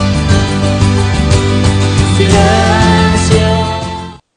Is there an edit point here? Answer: no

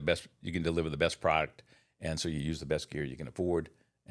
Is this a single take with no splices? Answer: yes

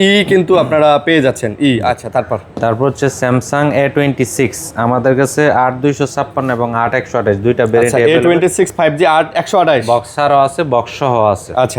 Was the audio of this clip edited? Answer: no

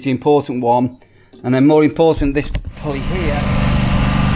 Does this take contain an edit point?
yes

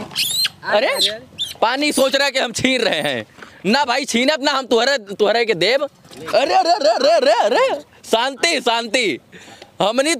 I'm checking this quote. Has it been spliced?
no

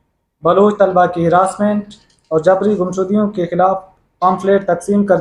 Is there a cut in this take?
no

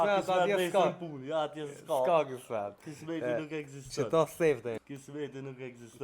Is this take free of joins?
no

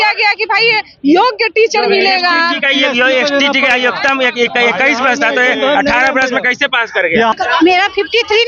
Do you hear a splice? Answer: yes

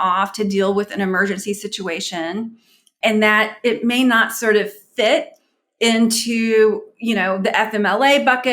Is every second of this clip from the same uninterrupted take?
no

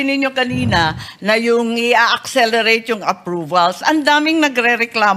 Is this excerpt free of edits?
yes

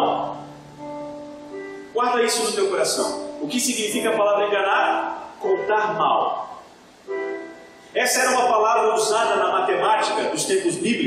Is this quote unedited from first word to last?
yes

